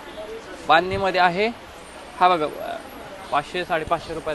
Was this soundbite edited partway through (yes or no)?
no